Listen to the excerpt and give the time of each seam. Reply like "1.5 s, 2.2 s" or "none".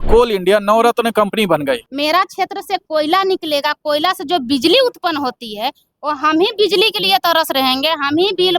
1.9 s